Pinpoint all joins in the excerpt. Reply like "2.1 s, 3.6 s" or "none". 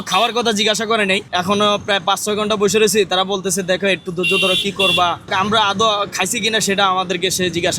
1.2 s, 5.3 s